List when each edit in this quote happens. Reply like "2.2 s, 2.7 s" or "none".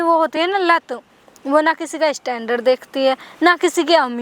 none